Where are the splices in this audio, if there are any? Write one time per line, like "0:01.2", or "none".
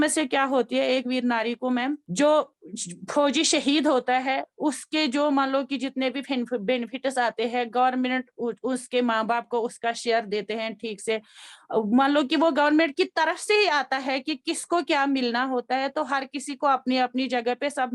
0:02.0